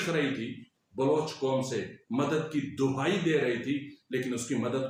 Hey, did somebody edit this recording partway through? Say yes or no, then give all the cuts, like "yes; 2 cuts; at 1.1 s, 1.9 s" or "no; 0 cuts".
no; 0 cuts